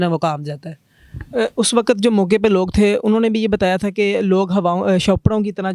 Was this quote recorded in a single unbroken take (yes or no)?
yes